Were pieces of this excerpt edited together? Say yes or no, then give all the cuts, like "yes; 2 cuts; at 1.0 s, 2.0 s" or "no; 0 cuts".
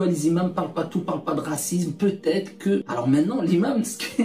yes; 1 cut; at 2.9 s